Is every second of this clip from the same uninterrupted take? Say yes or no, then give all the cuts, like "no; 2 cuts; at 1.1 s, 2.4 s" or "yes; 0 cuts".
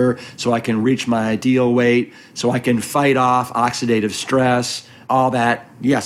no; 1 cut; at 5.0 s